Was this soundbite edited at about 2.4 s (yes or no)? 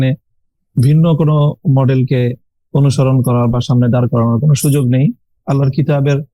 no